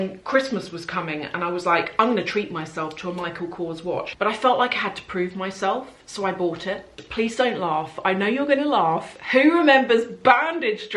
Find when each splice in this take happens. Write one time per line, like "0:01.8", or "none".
0:04.1
0:06.9